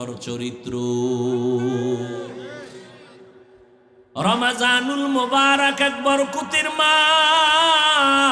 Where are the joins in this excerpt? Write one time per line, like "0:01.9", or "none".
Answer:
0:04.0